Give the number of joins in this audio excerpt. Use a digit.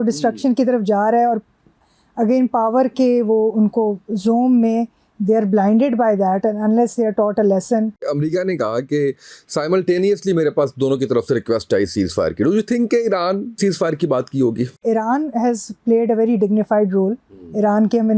3